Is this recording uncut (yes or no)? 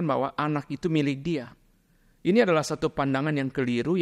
yes